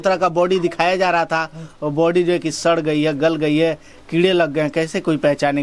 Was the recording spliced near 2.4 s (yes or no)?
no